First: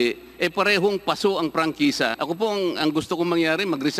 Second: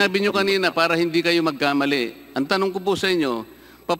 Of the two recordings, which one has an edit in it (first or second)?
first